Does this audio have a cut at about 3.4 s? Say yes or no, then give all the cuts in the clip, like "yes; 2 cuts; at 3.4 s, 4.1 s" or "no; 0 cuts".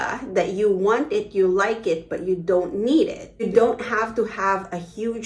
yes; 1 cut; at 3.4 s